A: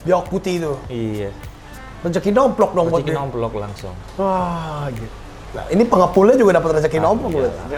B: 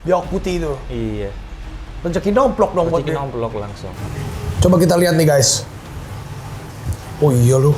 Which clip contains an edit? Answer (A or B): B